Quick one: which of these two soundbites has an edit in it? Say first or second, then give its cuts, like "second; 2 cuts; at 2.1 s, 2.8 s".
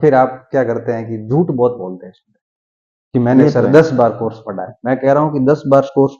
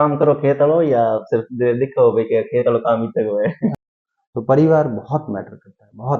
second; 1 cut; at 3.8 s